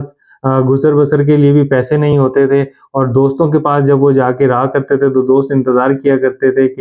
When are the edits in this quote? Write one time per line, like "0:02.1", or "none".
none